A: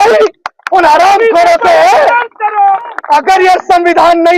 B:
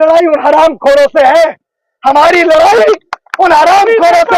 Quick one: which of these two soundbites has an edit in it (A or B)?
A